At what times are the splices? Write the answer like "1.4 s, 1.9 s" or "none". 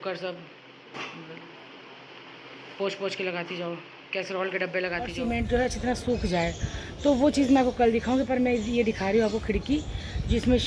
5.1 s